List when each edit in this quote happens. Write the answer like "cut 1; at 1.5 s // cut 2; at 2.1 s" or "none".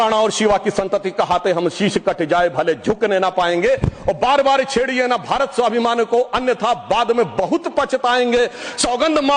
none